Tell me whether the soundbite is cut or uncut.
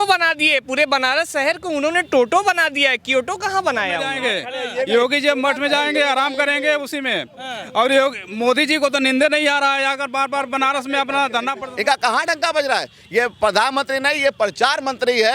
cut